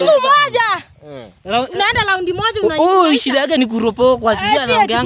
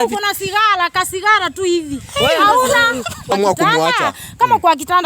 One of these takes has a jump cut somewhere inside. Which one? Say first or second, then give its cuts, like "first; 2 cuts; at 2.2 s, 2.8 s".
second; 1 cut; at 3.3 s